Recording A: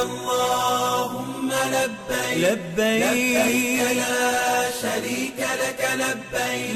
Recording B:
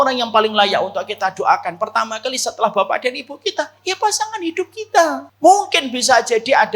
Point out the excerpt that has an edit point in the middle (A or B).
B